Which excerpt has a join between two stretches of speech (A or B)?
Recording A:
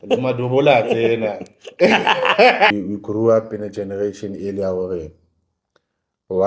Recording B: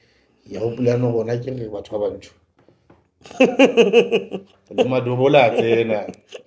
A